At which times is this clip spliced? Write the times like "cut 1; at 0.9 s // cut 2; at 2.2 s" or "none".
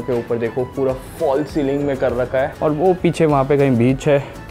cut 1; at 2.5 s